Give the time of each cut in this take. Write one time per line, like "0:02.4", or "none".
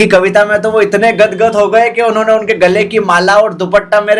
none